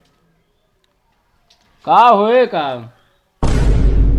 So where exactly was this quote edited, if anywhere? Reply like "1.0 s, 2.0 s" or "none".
3.2 s